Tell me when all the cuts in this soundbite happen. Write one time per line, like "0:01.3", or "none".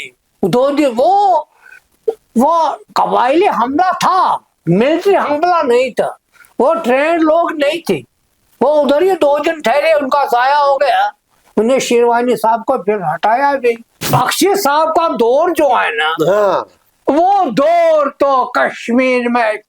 0:13.9